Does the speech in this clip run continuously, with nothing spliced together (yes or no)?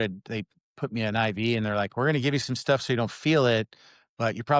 yes